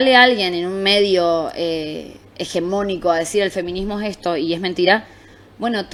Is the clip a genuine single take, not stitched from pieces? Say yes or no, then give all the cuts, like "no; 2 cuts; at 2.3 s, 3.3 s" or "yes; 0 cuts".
yes; 0 cuts